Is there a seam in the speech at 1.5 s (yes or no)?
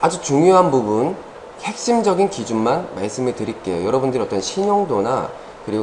yes